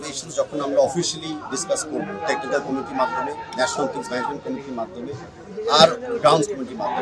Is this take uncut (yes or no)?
yes